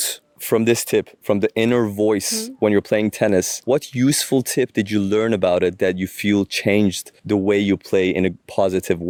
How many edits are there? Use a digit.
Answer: 0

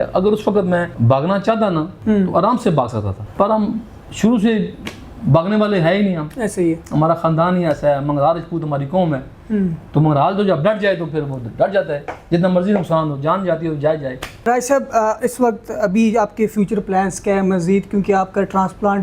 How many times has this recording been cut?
4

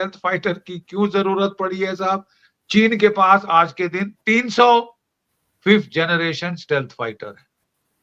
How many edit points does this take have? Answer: 0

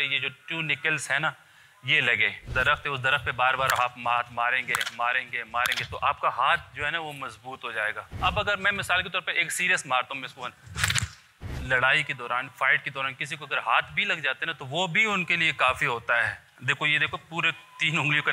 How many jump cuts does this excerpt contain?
4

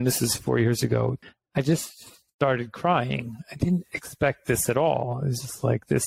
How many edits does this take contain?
1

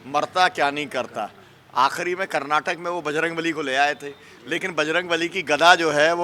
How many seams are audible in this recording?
0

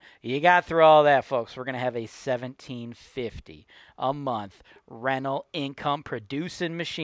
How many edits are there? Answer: 0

